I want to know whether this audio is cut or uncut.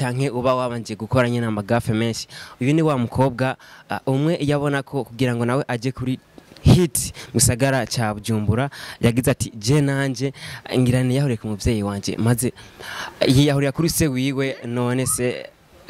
uncut